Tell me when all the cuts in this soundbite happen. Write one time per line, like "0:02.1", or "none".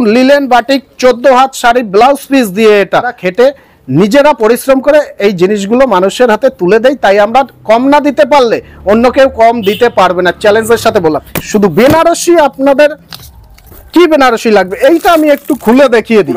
0:03.2
0:11.3